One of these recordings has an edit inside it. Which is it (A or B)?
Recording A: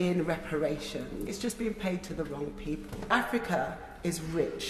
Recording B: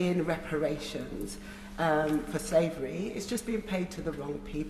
A